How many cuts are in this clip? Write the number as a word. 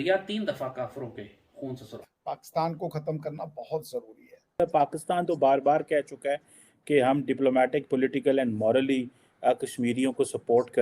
two